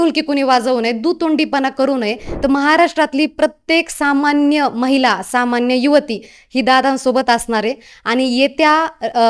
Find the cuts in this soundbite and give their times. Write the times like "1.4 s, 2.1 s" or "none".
2.2 s